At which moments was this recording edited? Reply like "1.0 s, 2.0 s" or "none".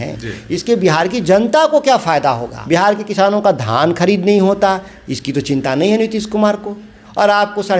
2.5 s